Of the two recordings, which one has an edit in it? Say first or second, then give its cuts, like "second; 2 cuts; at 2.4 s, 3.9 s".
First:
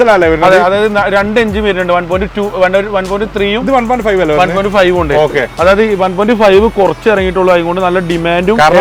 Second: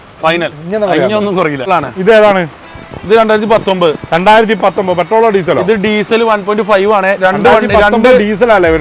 second; 1 cut; at 1.7 s